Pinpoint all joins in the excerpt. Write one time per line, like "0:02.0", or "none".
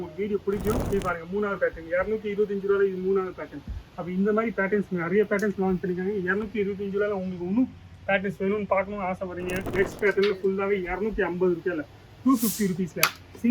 0:00.8
0:09.6